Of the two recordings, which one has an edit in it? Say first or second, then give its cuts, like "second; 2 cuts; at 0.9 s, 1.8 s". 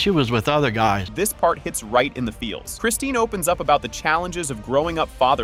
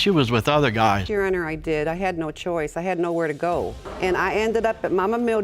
second; 1 cut; at 1.0 s